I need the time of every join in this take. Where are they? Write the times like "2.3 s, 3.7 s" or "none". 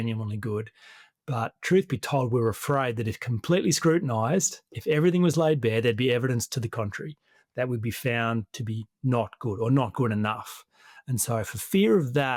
none